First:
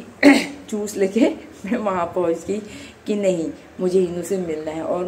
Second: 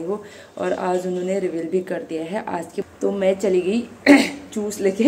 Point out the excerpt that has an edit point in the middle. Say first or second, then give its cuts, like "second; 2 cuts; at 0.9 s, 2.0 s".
second; 1 cut; at 2.9 s